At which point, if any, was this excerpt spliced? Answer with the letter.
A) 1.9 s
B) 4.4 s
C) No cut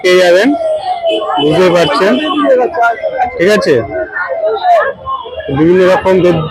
C